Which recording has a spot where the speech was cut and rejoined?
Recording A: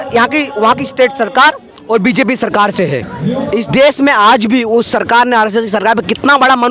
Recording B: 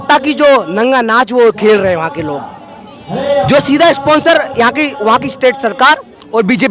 A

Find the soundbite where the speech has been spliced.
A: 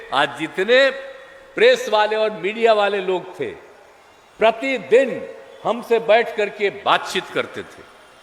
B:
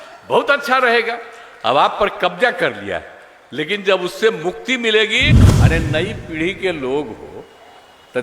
B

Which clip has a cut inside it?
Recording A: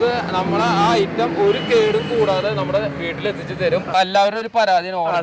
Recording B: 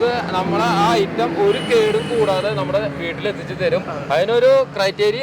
A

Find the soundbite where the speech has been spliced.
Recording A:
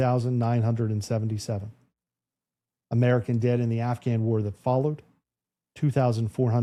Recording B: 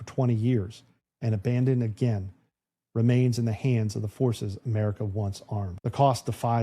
B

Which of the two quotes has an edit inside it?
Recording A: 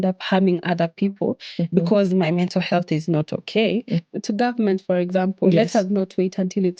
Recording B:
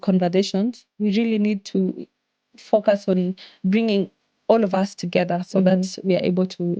A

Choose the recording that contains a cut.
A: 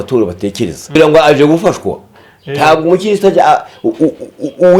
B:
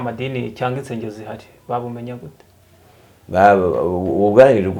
A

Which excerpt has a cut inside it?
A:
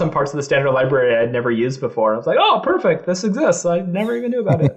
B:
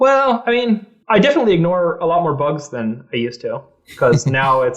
B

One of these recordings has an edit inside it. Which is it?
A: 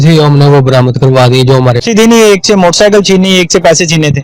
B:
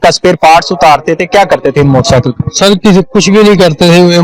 A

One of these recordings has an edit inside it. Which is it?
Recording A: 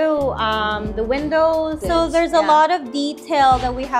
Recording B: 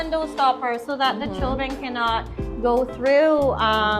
A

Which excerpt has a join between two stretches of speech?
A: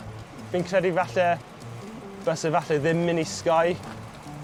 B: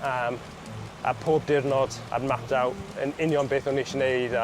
B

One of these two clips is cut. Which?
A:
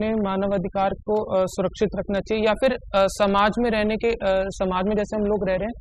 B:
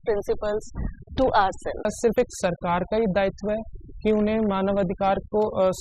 B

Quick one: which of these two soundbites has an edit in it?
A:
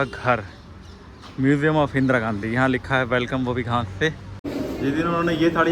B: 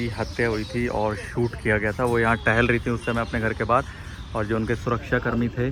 A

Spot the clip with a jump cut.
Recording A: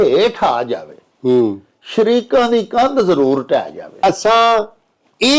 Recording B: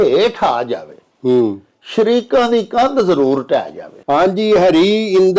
A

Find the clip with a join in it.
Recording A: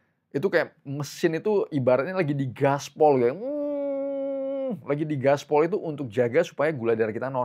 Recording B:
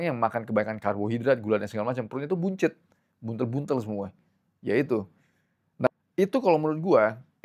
B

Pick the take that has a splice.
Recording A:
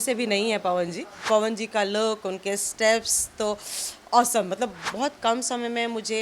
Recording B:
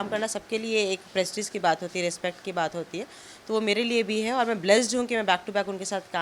A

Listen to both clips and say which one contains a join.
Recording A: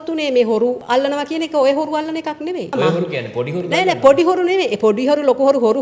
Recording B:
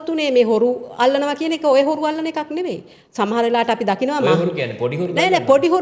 A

